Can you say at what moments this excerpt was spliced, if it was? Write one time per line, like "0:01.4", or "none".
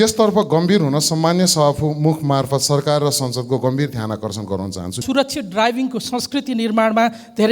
0:05.0